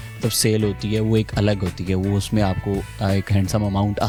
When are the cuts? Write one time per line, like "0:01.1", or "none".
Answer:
none